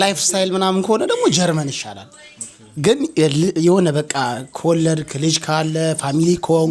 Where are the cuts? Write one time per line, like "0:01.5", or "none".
none

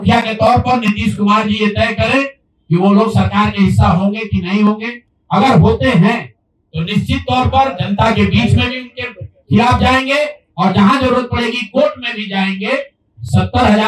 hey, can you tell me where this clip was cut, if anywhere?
none

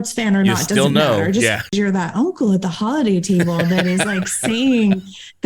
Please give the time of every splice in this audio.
0:01.7

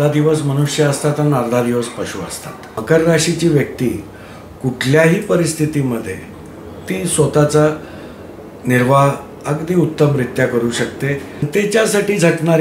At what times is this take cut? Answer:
0:02.8
0:11.5

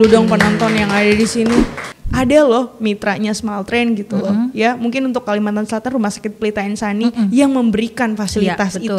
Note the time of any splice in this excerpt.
0:01.9

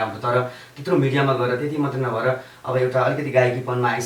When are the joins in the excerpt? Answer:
none

